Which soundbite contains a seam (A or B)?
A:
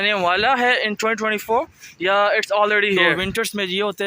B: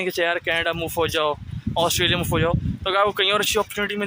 A